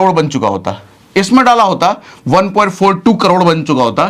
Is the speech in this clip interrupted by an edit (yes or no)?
no